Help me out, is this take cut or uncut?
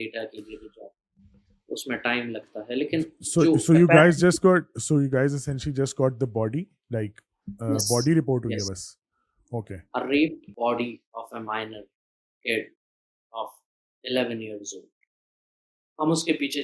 cut